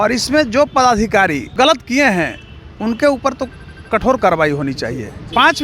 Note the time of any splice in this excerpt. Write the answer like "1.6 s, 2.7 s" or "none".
1.5 s